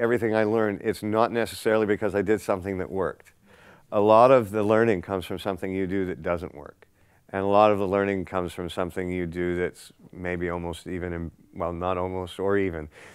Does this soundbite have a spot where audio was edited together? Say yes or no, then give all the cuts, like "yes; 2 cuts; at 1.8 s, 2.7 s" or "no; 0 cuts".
no; 0 cuts